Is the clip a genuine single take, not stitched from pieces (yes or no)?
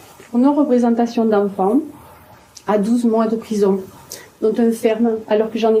yes